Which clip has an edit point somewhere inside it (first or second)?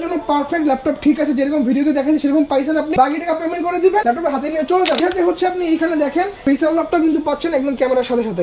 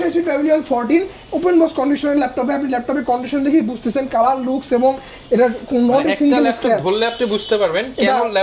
first